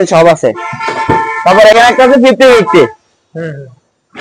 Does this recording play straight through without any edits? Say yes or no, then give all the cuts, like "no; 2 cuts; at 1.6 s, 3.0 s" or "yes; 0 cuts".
yes; 0 cuts